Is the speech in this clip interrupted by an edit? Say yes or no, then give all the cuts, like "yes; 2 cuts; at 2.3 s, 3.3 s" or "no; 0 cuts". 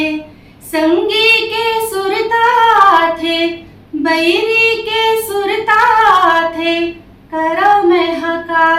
no; 0 cuts